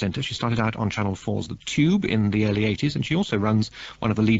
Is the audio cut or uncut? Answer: uncut